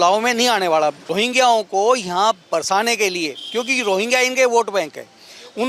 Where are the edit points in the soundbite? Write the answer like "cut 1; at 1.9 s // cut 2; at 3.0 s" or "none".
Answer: cut 1; at 1.0 s